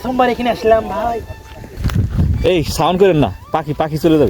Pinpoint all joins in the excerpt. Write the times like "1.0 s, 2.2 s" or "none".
1.8 s